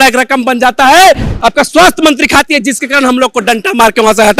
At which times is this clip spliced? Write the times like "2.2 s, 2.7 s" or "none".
1.3 s